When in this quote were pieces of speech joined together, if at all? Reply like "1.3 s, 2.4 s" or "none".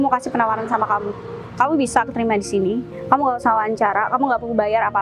none